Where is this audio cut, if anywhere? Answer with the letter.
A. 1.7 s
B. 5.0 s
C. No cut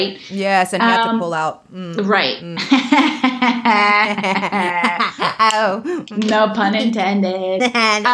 C